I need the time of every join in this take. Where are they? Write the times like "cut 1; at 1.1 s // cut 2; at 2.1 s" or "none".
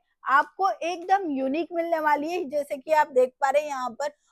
none